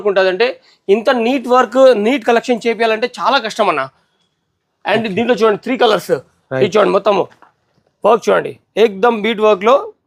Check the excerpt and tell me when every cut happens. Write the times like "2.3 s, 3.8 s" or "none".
none